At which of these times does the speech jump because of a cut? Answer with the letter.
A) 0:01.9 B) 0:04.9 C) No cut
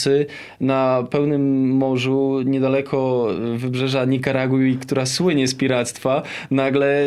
C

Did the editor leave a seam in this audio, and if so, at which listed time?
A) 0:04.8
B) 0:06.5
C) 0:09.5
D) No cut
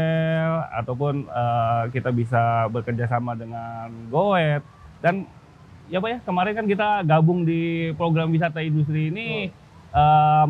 D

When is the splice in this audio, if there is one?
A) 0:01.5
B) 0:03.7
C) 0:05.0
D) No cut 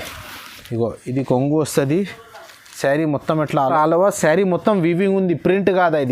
B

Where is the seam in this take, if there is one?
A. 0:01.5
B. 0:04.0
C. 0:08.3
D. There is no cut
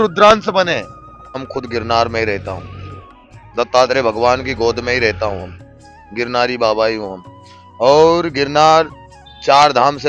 A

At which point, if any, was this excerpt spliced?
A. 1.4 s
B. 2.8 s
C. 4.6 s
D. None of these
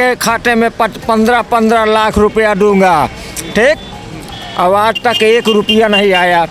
D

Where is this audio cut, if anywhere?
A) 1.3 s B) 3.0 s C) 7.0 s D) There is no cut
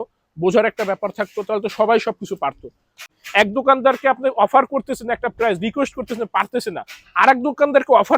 B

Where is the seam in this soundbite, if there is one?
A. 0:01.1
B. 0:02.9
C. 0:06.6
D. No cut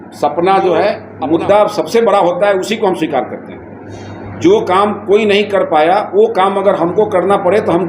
A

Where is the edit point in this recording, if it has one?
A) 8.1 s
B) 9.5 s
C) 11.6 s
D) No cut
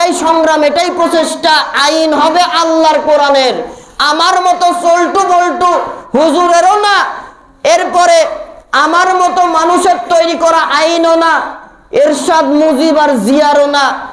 D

